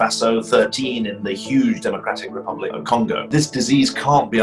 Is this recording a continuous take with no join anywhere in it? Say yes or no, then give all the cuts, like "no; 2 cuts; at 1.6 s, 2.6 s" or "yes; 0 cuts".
no; 1 cut; at 3.2 s